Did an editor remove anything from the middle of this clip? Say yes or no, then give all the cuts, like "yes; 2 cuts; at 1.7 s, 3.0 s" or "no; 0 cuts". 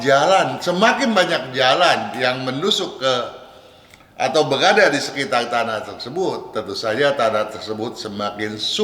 no; 0 cuts